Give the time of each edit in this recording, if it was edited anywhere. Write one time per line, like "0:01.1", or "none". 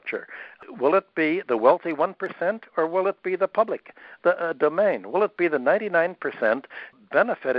none